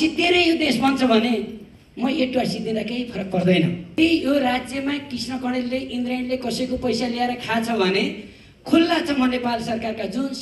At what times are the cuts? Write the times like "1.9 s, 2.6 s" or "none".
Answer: 3.9 s

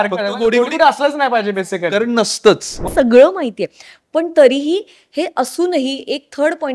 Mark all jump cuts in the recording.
2.9 s

